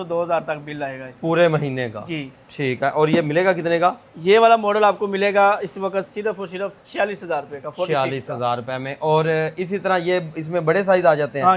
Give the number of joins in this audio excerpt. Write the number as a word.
zero